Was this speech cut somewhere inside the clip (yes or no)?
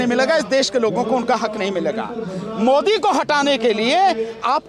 no